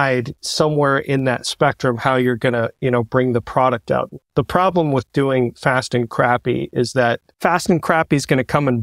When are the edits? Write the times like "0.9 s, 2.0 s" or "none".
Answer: 7.3 s